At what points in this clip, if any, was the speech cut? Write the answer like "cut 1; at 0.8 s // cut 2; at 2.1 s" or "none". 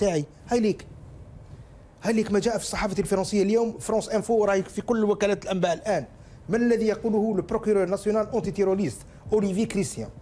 none